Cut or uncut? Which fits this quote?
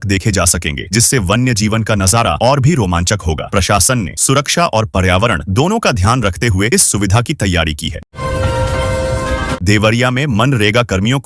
uncut